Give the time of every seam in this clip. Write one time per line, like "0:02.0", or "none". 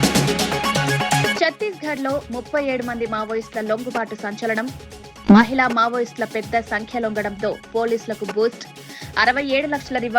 0:01.3